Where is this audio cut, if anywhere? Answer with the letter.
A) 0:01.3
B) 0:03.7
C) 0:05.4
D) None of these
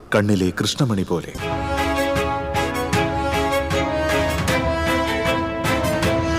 A